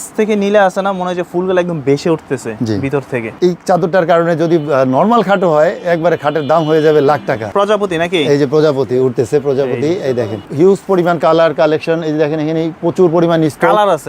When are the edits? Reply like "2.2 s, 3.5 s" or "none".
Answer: 3.3 s, 7.5 s, 10.5 s